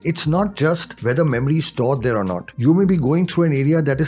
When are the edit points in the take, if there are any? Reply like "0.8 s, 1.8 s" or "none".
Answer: 1.0 s, 2.5 s